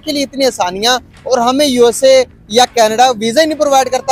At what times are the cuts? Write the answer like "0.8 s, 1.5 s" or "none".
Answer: none